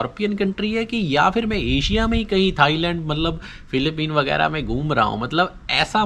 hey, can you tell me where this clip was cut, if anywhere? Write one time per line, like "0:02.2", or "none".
none